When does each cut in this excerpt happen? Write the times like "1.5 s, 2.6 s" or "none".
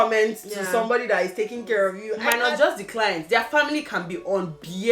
2.1 s